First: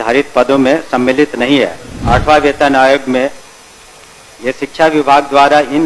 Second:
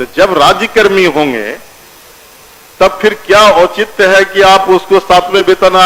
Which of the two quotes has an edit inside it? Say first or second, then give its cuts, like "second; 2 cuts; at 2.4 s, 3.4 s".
first; 1 cut; at 2.0 s